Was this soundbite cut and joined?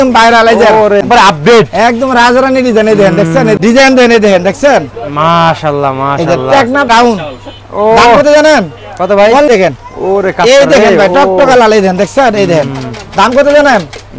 yes; 4 cuts; at 1.0 s, 3.6 s, 6.9 s, 9.5 s

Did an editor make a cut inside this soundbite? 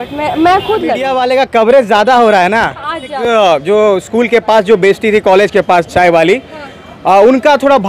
yes; 2 cuts; at 1.1 s, 3.2 s

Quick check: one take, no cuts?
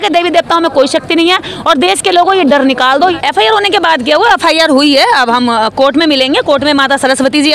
no; 1 cut; at 3.1 s

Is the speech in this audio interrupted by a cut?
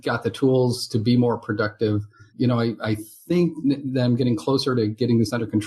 yes; 1 cut; at 2.3 s

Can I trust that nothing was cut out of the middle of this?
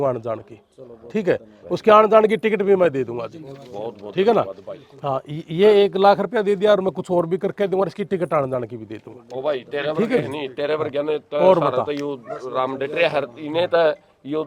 yes; 0 cuts

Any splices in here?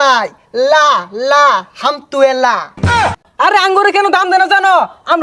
yes; 1 cut; at 3.2 s

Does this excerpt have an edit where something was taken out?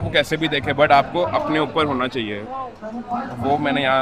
no; 0 cuts

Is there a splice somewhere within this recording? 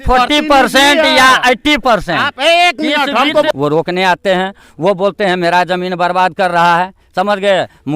yes; 1 cut; at 3.5 s

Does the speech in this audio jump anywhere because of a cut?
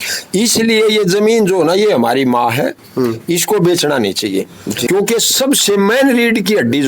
yes; 1 cut; at 4.8 s

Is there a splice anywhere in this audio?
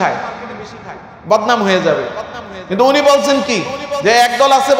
no; 0 cuts

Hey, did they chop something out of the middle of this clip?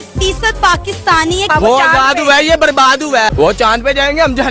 yes; 2 cuts; at 1.5 s, 3.3 s

